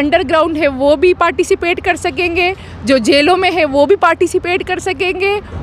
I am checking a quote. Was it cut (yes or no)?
no